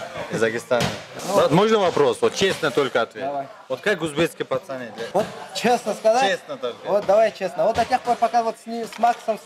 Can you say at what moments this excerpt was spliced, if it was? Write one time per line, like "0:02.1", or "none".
0:01.1
0:05.0